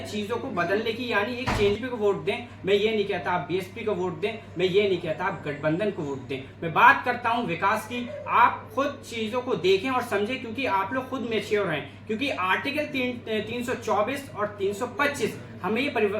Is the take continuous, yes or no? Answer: no